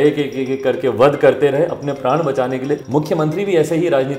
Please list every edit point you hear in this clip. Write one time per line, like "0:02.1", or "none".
0:02.8